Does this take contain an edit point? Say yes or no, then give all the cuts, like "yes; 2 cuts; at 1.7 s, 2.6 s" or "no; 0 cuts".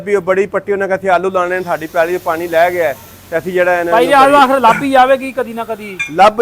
no; 0 cuts